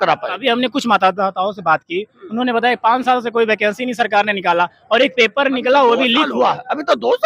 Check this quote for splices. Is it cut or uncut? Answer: uncut